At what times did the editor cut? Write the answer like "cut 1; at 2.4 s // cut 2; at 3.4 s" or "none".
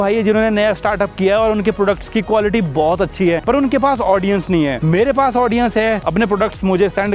none